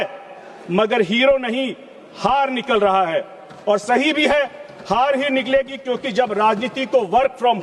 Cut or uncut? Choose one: uncut